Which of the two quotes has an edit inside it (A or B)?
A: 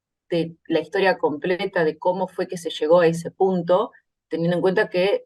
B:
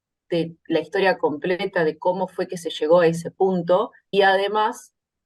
B